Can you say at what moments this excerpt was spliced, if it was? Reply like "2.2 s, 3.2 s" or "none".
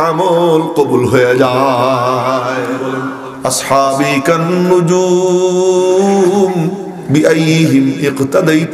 3.1 s

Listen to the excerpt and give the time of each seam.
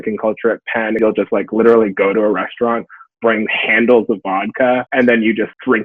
none

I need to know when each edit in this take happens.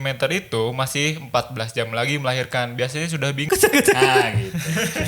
3.5 s

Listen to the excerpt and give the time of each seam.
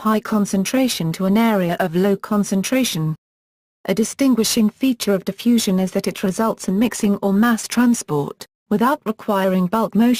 none

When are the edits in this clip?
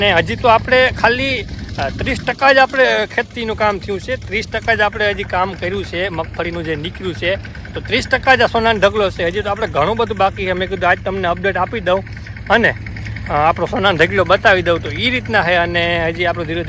none

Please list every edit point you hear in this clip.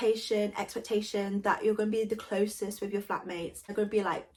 none

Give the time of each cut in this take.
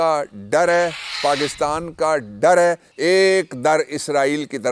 2.9 s

